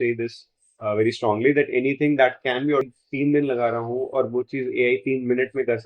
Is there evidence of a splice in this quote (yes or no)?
yes